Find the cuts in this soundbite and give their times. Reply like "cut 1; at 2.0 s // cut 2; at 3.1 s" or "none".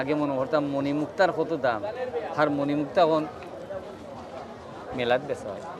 none